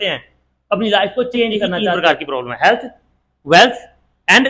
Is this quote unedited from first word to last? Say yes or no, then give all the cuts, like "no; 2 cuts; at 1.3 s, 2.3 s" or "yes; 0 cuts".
no; 1 cut; at 1.9 s